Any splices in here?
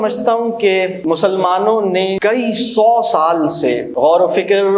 yes; 3 cuts; at 1.0 s, 2.2 s, 3.9 s

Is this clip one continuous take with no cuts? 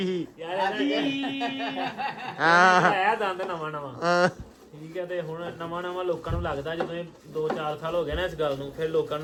yes; 0 cuts

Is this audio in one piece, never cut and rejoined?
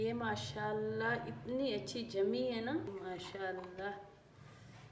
no; 1 cut; at 2.9 s

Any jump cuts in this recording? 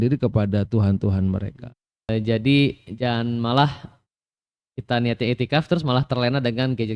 yes; 1 cut; at 2.1 s

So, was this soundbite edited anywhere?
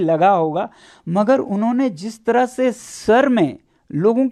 no; 0 cuts

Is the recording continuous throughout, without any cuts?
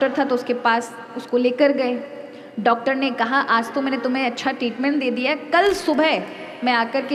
yes; 0 cuts

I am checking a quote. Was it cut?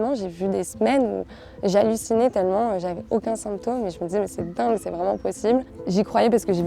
yes; 1 cut; at 5.8 s

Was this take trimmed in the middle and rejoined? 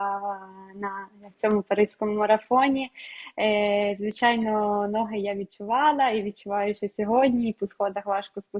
no; 0 cuts

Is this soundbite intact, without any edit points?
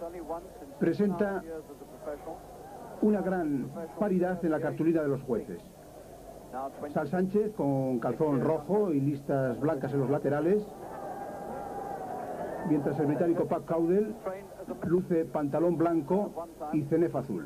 no; 1 cut; at 8.3 s

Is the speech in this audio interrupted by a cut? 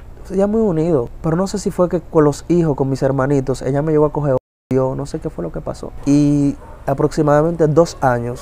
yes; 2 cuts; at 1.1 s, 5.9 s

